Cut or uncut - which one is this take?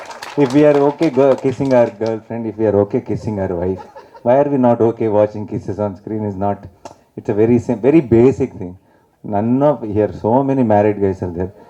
uncut